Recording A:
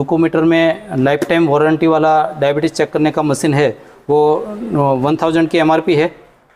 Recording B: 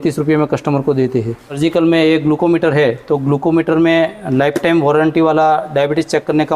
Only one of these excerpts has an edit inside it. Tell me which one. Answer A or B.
B